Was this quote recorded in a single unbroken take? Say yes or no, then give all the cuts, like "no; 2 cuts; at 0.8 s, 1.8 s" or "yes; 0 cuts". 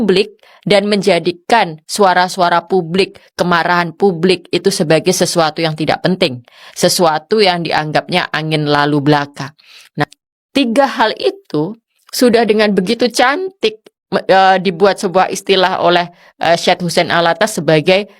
no; 1 cut; at 10.0 s